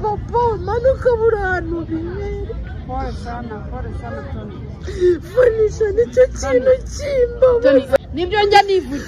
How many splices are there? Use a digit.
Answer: 1